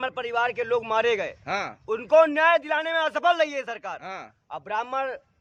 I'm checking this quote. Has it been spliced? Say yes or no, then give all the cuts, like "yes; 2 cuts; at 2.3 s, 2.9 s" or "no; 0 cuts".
no; 0 cuts